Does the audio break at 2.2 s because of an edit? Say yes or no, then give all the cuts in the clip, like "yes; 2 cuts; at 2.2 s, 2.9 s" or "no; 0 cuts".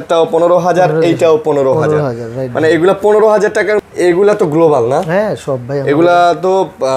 no; 1 cut; at 3.8 s